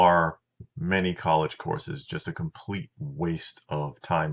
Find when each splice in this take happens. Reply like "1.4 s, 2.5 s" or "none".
2.1 s